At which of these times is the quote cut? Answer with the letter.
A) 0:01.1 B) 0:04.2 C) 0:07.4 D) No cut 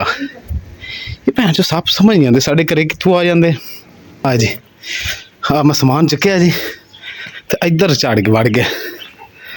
B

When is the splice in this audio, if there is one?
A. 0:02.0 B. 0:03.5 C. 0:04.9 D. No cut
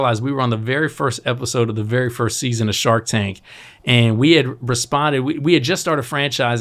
D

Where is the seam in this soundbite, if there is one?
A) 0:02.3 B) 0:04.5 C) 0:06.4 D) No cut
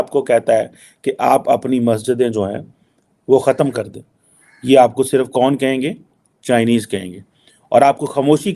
D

